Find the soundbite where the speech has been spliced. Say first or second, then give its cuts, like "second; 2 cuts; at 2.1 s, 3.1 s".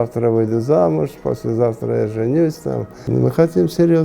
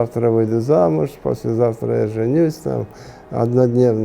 first; 1 cut; at 3.1 s